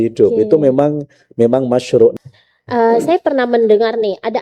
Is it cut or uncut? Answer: cut